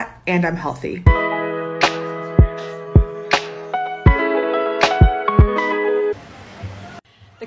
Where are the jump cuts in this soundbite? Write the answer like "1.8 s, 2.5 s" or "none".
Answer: 1.0 s